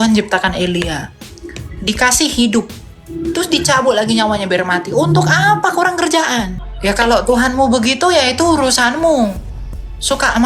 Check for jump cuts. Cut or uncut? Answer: uncut